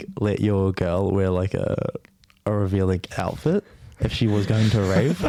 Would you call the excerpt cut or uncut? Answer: uncut